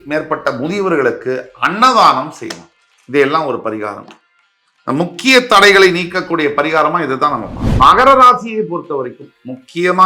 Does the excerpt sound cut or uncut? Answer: cut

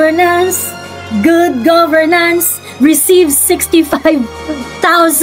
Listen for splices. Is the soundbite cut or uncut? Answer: uncut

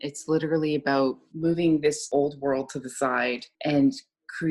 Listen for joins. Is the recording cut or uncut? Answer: cut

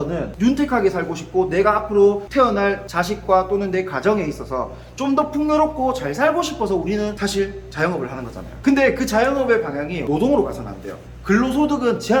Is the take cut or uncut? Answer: uncut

